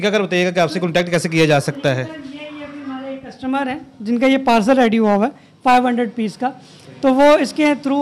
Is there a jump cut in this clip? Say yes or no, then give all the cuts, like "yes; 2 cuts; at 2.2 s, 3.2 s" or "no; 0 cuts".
no; 0 cuts